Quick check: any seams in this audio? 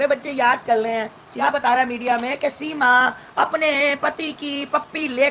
yes; 1 cut; at 1.2 s

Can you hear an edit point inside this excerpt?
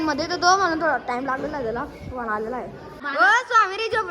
yes; 1 cut; at 3.0 s

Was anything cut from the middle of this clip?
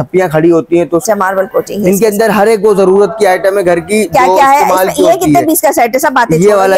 yes; 1 cut; at 1.0 s

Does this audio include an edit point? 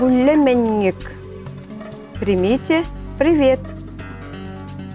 yes; 1 cut; at 3.7 s

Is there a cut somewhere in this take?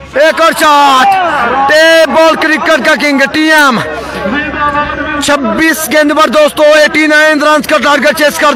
no; 0 cuts

